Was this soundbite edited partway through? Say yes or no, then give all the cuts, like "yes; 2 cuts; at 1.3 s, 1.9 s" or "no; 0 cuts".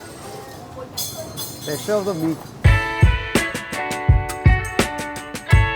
yes; 1 cut; at 2.6 s